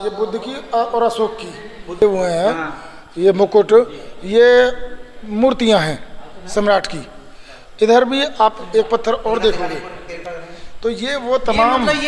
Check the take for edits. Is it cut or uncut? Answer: cut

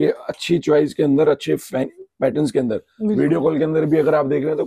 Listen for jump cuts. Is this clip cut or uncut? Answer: uncut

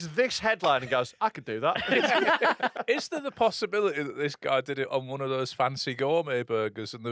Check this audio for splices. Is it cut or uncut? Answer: cut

